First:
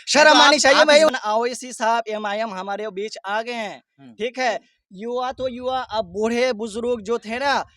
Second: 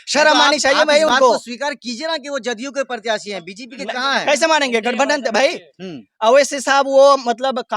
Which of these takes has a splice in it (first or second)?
first